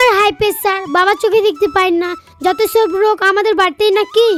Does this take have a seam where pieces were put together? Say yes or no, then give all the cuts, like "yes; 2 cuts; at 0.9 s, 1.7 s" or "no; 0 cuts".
no; 0 cuts